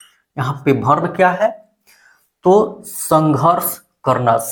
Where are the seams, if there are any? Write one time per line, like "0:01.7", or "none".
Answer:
none